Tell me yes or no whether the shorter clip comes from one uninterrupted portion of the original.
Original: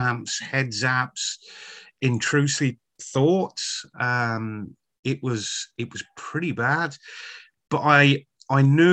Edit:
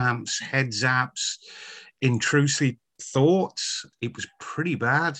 no